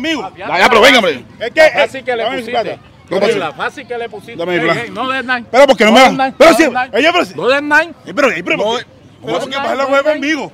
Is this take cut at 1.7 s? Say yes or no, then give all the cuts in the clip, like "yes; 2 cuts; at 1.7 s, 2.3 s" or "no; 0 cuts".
no; 0 cuts